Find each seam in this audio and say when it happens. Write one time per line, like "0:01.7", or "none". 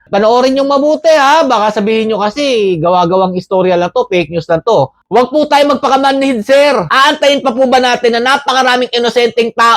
0:05.0